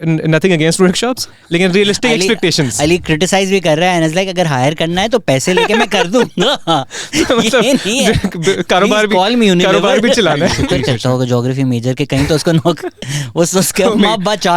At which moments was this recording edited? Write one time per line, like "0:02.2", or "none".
0:10.6